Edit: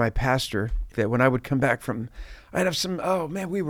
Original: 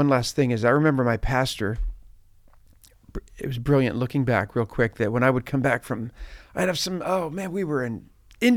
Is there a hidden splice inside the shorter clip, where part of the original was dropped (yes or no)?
yes